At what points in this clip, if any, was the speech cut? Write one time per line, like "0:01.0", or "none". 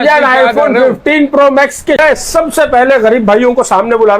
0:02.0